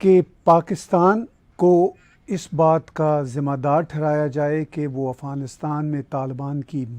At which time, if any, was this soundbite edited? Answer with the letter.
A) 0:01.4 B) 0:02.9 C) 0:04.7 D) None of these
A